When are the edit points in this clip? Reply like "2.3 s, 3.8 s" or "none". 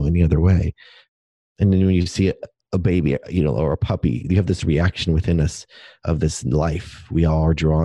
1.0 s, 2.5 s